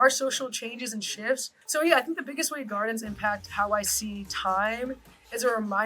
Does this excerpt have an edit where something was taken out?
yes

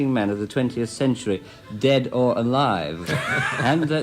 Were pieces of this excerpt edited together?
yes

